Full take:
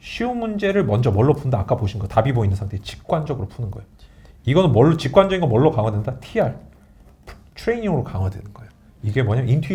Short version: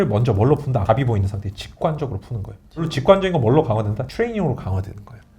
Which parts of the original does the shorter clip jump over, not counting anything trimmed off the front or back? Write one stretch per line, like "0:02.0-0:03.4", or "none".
0:01.6-0:02.1
0:04.2-0:05.0
0:06.1-0:07.5